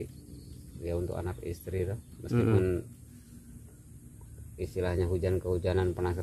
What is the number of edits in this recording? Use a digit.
0